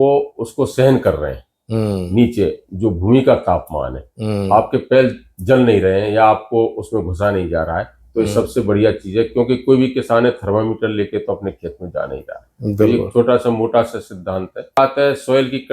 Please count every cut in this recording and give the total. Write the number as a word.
one